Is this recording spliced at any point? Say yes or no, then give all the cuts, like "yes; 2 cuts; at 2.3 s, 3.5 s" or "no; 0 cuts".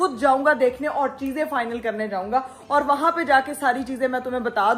no; 0 cuts